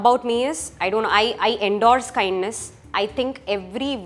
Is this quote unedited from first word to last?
yes; 0 cuts

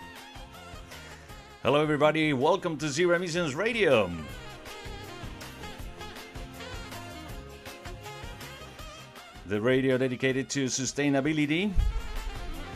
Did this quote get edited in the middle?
no; 0 cuts

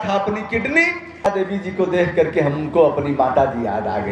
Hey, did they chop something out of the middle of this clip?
yes; 1 cut; at 1.3 s

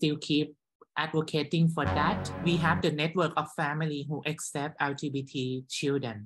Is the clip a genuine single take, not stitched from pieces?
no; 1 cut; at 2.3 s

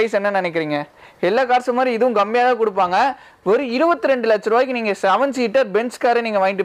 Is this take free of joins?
yes; 0 cuts

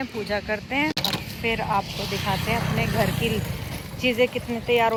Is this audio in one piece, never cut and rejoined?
yes; 0 cuts

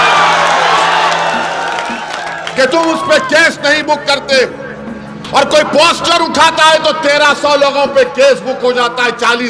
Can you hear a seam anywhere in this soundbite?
no; 0 cuts

